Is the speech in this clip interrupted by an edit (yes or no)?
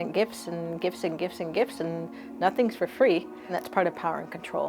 yes